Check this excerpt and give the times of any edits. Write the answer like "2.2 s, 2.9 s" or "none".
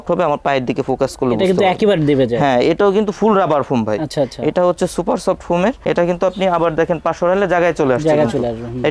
none